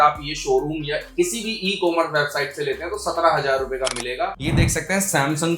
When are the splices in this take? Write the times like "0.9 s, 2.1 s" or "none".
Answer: 4.6 s